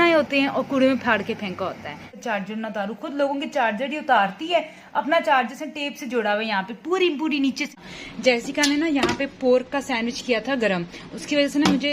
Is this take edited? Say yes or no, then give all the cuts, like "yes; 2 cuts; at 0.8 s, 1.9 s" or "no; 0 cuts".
yes; 2 cuts; at 2.2 s, 7.7 s